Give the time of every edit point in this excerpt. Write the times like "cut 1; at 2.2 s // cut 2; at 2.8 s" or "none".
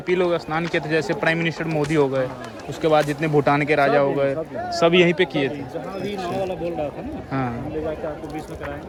none